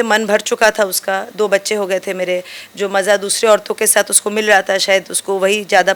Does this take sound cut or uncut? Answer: uncut